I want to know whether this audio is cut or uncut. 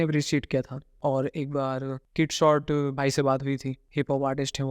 cut